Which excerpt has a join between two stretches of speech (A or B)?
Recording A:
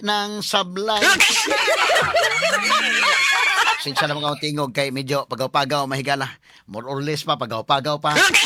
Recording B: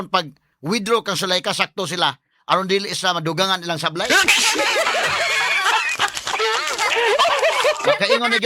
B